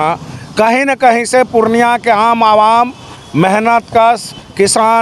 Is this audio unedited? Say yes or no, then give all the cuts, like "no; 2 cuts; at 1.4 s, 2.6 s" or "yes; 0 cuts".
yes; 0 cuts